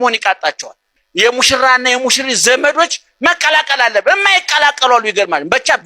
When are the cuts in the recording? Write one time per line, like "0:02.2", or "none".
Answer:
0:01.0